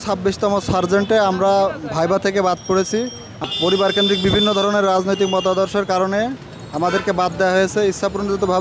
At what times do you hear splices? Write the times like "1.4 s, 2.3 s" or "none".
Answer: 3.4 s